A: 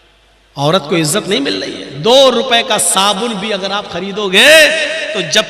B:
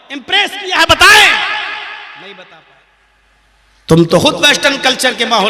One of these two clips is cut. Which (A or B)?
B